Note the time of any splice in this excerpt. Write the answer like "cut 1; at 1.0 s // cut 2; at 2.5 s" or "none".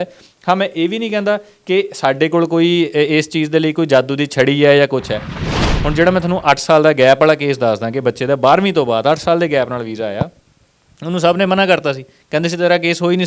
cut 1; at 5.5 s